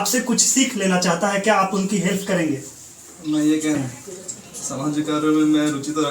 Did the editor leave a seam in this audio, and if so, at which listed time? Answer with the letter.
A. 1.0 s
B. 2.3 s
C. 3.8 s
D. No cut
C